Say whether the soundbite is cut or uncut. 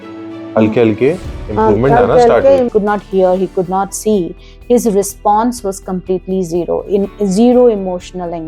cut